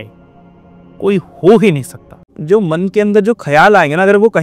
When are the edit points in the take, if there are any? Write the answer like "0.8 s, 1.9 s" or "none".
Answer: 2.4 s